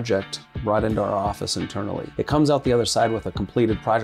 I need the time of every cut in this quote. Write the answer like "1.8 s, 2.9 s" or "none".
2.1 s

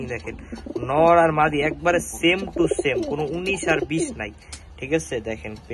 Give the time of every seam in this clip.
none

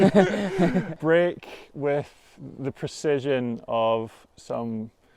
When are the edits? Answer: 0.9 s

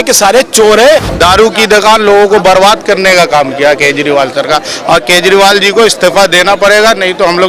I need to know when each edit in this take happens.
1.1 s

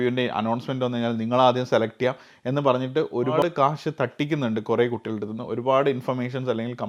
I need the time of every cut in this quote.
none

